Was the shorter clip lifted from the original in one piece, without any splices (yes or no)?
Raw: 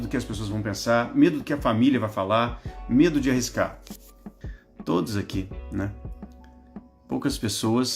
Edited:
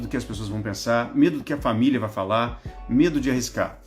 yes